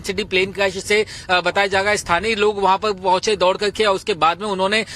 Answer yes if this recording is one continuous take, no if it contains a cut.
no